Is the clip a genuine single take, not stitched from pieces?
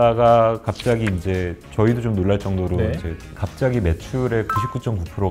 no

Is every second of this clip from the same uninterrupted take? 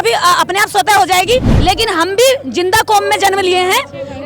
no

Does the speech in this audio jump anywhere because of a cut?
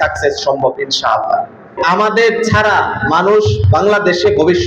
yes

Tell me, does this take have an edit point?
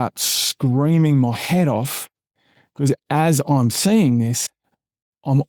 no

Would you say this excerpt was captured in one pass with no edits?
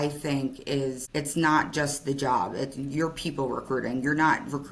no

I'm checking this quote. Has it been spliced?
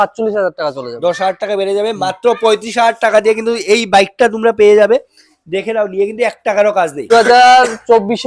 yes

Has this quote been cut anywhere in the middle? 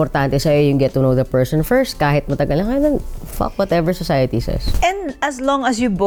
no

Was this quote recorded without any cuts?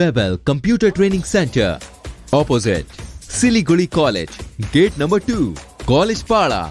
yes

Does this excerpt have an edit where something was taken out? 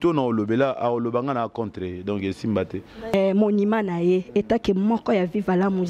yes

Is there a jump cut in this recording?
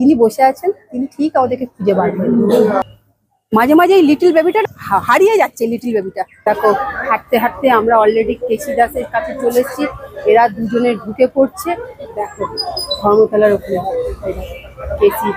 yes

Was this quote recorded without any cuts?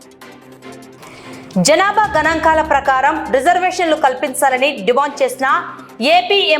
yes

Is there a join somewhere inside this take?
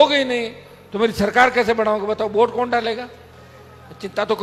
no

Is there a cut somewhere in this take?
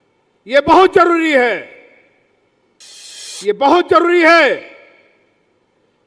yes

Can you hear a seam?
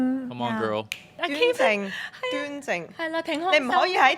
yes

